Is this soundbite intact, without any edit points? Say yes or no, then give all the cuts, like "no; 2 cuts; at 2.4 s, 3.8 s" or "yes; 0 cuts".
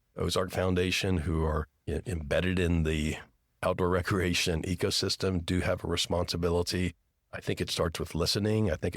yes; 0 cuts